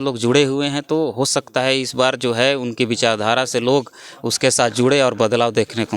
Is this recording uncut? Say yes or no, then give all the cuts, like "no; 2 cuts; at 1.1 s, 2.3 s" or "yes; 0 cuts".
yes; 0 cuts